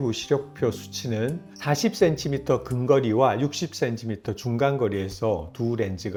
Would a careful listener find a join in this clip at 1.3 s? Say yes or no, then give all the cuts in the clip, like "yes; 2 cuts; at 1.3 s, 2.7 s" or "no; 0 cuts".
no; 0 cuts